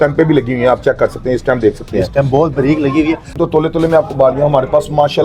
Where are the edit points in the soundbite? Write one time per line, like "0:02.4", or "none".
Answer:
0:03.3